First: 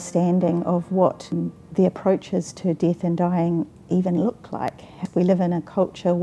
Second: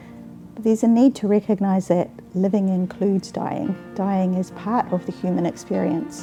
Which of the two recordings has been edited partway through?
first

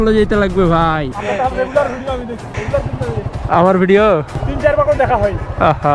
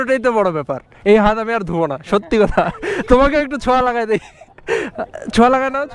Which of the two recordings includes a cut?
first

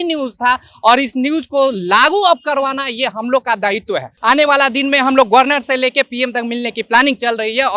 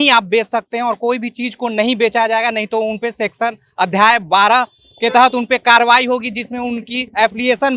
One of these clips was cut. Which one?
first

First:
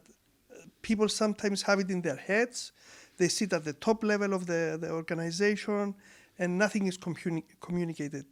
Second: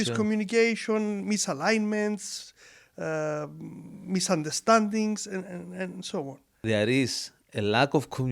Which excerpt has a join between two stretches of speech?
second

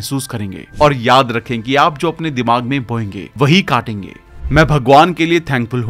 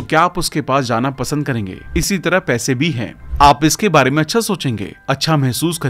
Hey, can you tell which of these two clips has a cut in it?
first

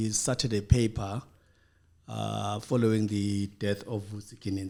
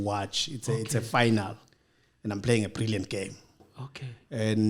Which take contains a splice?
second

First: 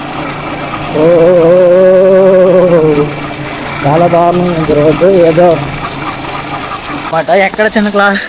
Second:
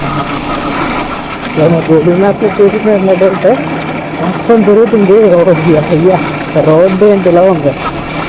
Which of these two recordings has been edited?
first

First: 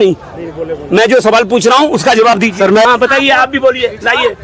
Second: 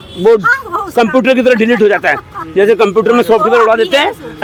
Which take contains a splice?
first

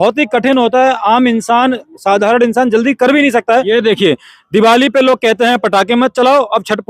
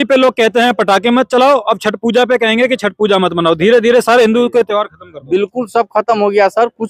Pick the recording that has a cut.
first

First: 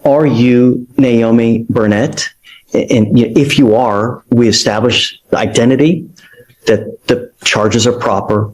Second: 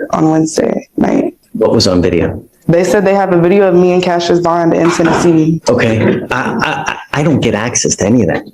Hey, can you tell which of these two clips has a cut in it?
second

